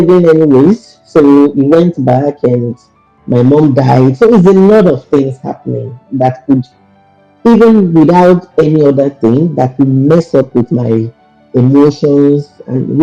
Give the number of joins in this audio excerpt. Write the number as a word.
zero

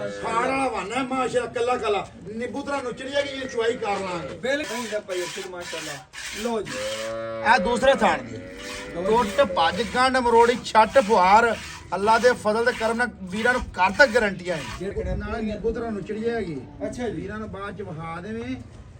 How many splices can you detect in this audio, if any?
two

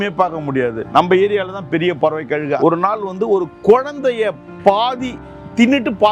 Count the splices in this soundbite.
two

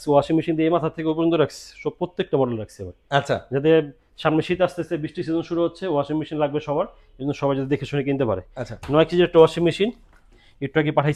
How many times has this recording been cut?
zero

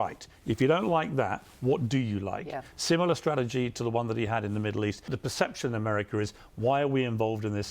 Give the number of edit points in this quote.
one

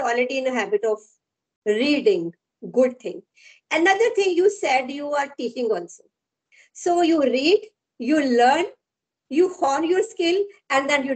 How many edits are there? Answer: zero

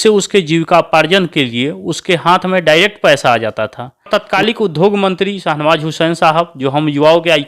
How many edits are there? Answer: one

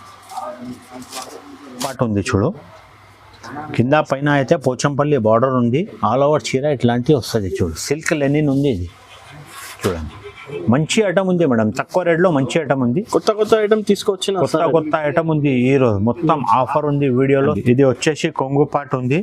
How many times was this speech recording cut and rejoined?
two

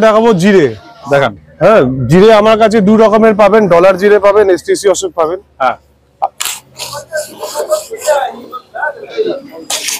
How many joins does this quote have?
zero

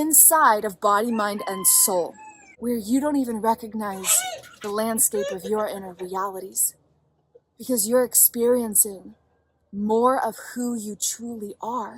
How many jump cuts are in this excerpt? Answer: one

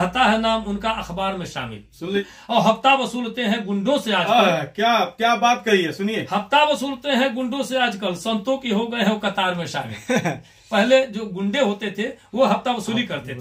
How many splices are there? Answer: one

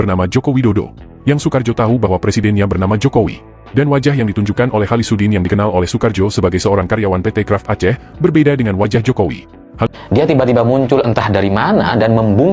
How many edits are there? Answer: one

